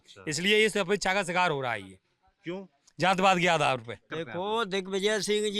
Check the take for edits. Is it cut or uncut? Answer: cut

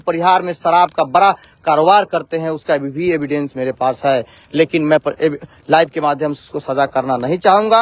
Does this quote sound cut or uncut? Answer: uncut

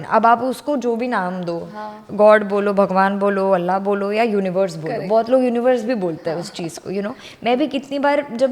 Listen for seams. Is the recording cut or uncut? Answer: uncut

